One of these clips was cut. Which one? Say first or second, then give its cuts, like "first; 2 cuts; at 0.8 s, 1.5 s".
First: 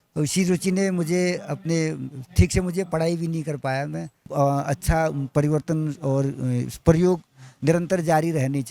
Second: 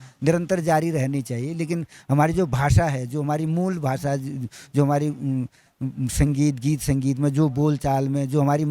first; 1 cut; at 4.2 s